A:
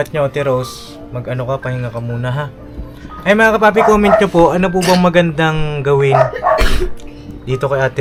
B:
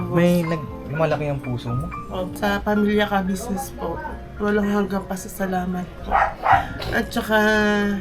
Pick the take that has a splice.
B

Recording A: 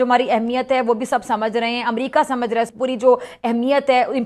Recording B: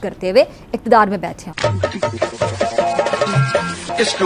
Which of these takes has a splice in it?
A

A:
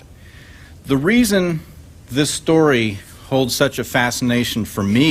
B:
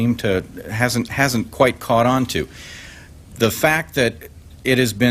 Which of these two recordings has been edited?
A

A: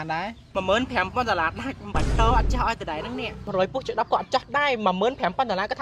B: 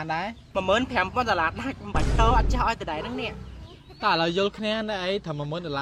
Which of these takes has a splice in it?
A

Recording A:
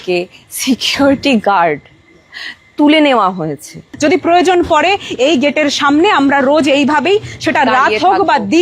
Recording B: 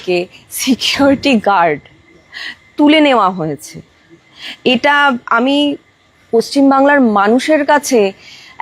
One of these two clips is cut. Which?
A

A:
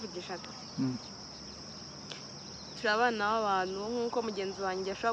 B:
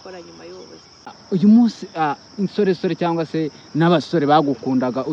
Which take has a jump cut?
B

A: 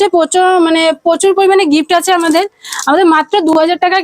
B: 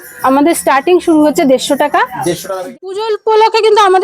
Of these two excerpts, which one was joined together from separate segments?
B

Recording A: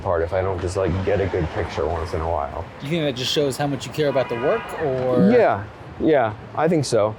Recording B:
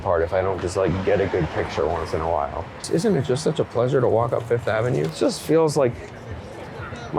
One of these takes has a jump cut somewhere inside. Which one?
B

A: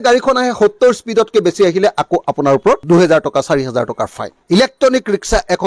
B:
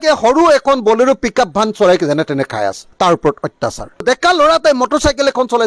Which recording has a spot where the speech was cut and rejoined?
A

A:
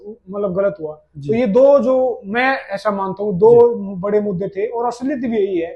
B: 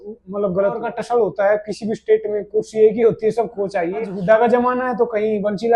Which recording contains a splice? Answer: B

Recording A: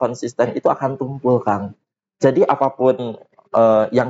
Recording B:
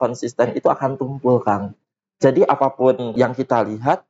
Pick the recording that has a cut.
B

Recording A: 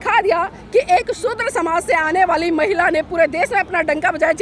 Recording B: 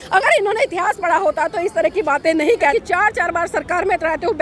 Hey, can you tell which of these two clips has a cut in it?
B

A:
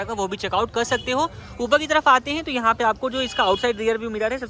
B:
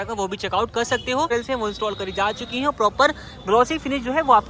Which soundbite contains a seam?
B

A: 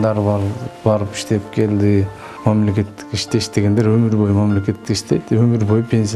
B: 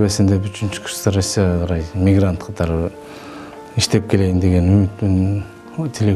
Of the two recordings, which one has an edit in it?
A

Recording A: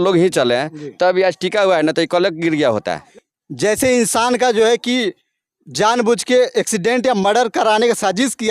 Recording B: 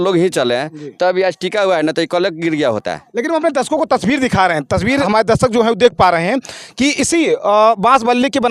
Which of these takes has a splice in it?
A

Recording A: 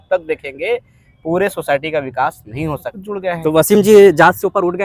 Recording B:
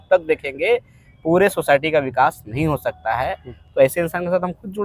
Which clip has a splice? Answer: A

